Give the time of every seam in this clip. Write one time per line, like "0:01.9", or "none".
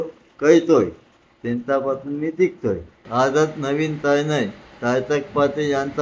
0:03.0